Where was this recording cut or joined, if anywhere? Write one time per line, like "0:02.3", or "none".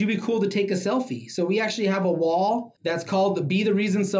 0:02.7